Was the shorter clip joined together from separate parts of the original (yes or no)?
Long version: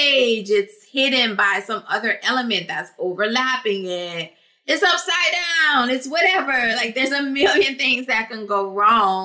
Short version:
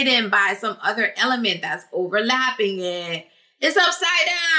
no